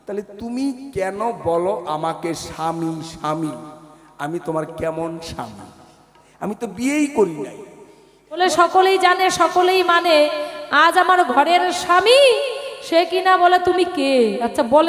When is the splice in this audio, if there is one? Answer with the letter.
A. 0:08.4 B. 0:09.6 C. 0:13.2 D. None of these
A